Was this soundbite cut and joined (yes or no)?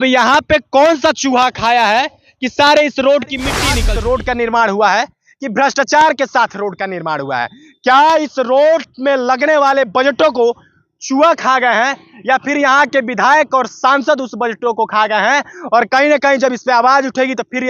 yes